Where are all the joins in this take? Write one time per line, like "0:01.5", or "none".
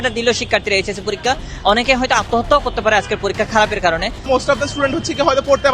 0:04.2